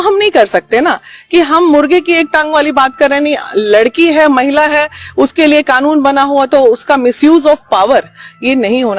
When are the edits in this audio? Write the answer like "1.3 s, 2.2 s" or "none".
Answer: none